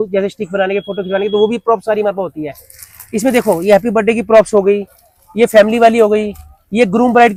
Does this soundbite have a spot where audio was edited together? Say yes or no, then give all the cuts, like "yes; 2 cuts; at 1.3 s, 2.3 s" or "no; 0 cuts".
no; 0 cuts